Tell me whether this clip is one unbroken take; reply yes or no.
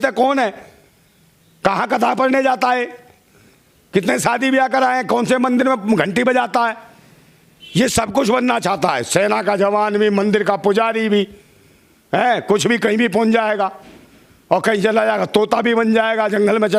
yes